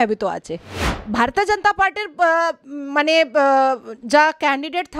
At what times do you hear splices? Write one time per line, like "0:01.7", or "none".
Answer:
0:01.0